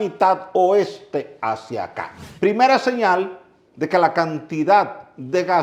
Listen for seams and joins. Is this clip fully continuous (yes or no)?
no